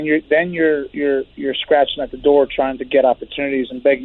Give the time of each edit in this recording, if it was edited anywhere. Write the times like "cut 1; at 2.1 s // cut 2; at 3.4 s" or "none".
none